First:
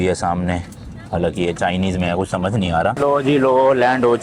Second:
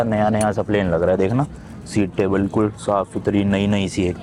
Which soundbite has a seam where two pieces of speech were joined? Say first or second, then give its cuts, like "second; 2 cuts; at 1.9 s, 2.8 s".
first; 1 cut; at 3.0 s